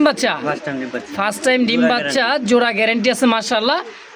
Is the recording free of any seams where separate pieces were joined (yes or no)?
yes